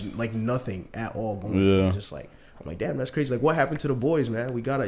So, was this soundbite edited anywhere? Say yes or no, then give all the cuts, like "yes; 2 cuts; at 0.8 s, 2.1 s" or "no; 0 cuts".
no; 0 cuts